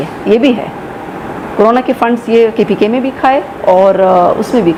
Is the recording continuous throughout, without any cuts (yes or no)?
yes